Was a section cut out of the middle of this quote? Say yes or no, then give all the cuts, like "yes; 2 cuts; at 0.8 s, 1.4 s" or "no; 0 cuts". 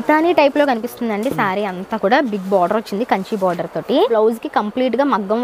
yes; 1 cut; at 4.1 s